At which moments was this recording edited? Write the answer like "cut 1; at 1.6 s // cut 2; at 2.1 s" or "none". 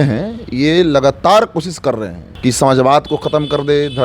cut 1; at 2.2 s